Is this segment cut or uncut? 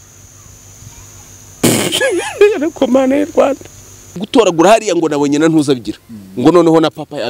cut